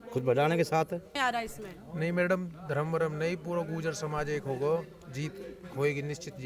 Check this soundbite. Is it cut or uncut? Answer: cut